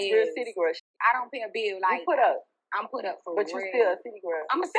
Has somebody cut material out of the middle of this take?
yes; 1 cut; at 0.9 s

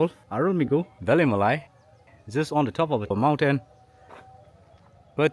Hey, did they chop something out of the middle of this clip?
no; 0 cuts

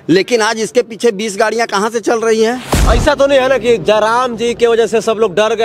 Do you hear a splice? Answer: yes; 1 cut; at 2.7 s

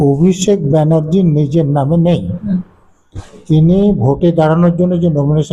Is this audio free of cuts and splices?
yes; 0 cuts

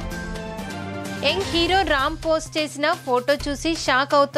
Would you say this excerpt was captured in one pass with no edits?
no; 1 cut; at 1.2 s

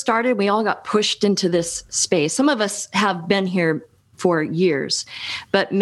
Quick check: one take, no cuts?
yes; 0 cuts

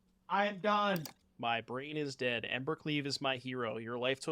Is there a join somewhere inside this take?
yes; 1 cut; at 1.2 s

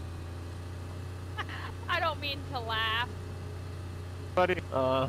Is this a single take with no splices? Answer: yes; 0 cuts

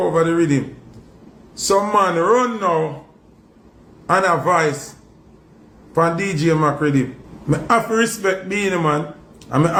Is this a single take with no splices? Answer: yes; 0 cuts

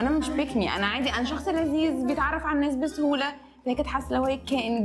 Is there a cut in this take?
no; 0 cuts

